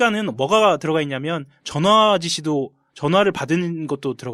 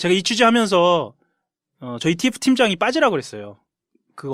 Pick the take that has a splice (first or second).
second